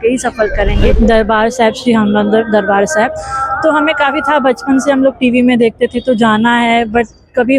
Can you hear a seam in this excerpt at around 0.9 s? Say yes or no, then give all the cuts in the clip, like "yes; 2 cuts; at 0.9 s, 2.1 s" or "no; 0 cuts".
yes; 1 cut; at 0.9 s